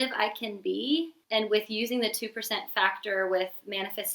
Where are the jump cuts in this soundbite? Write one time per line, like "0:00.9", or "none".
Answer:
0:01.2